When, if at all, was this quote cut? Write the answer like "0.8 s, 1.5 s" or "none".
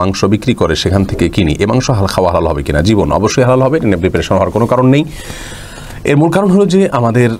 none